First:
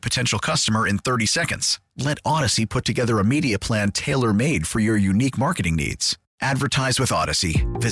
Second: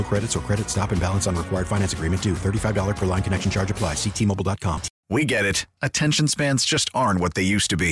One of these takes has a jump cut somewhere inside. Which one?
second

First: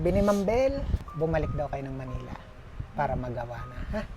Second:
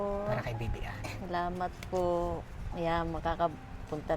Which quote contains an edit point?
first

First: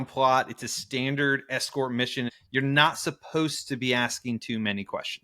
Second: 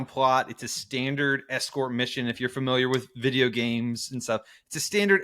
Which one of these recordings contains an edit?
first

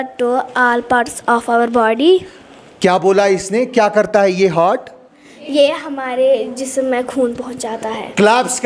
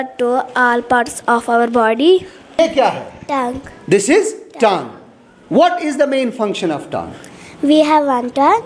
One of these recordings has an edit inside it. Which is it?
second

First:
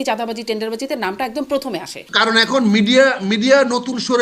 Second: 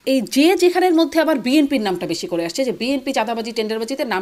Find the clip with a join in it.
first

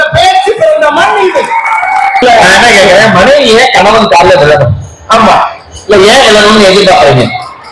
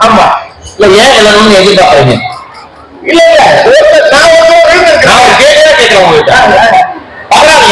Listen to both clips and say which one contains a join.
first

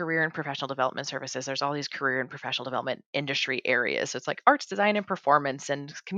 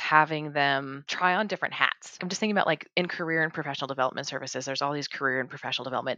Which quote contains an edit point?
second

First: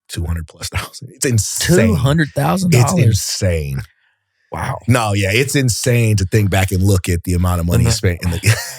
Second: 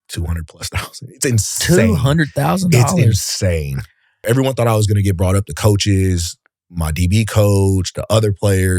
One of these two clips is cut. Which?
second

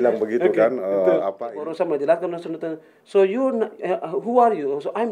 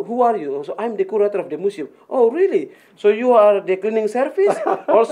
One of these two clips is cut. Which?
first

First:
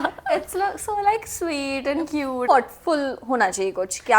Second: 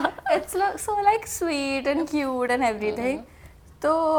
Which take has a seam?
first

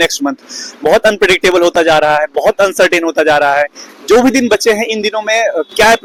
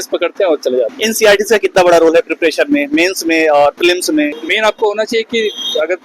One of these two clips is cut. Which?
second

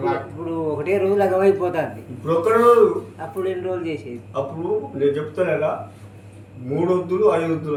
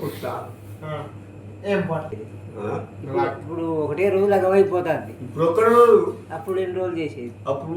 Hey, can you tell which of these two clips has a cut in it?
second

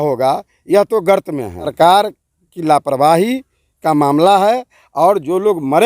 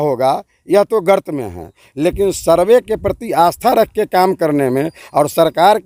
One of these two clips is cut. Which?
first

